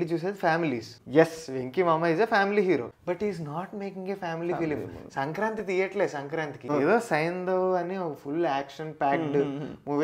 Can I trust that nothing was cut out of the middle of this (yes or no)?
no